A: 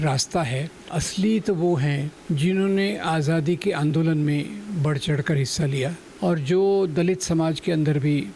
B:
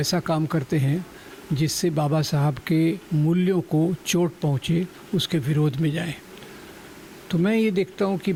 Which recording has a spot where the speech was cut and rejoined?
A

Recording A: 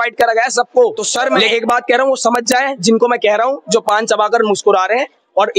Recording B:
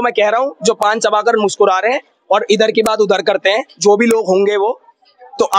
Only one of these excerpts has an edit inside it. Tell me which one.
A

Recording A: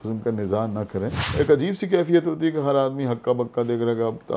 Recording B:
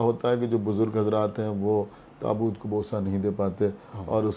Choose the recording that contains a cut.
A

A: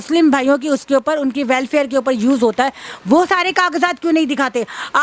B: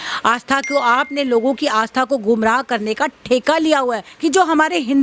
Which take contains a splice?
B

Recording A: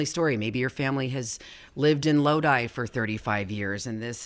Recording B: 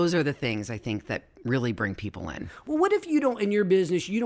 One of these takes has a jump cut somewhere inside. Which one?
B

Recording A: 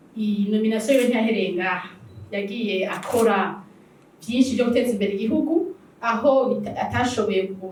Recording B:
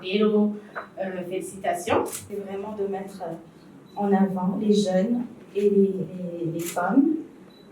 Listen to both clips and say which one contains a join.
B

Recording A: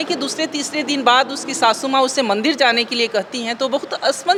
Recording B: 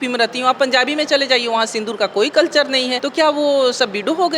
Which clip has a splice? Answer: B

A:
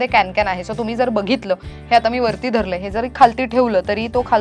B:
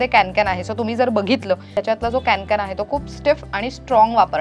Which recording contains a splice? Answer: B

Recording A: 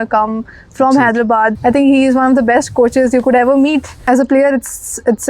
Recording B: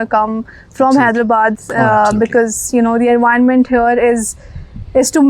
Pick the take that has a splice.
A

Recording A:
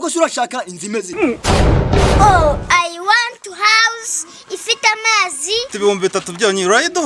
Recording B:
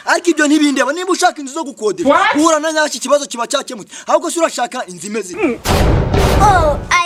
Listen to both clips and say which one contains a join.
A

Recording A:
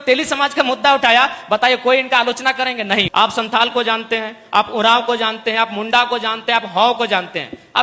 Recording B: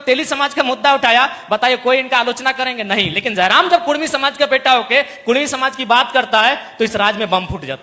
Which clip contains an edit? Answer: A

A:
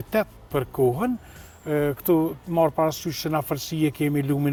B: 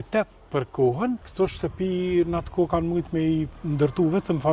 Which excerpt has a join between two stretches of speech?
B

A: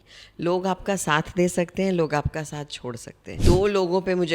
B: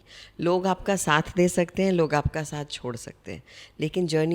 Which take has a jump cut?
A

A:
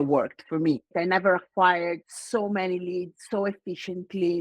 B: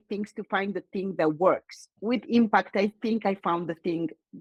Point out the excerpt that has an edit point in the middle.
A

